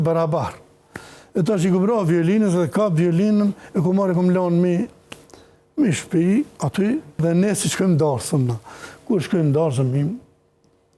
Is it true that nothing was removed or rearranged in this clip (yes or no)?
no